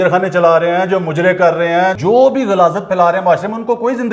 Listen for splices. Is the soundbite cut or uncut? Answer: cut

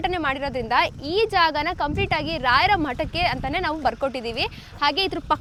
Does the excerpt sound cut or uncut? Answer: uncut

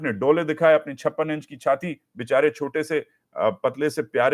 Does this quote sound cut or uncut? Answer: uncut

